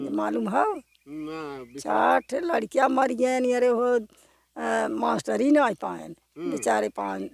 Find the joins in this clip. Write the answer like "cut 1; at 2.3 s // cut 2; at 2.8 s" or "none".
none